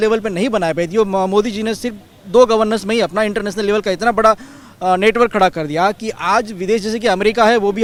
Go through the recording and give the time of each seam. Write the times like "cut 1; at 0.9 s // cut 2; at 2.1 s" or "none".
none

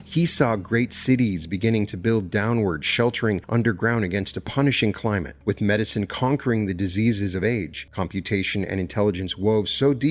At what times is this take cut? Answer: cut 1; at 3.4 s // cut 2; at 5.3 s // cut 3; at 7.8 s

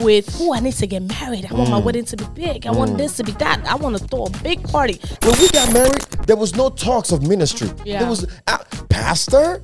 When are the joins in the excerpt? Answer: cut 1; at 5.1 s

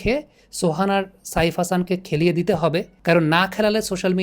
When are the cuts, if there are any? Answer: cut 1; at 2.9 s

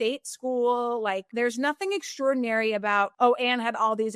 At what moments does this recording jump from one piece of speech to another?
cut 1; at 1.3 s // cut 2; at 3.1 s

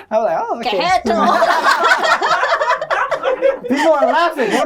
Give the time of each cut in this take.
none

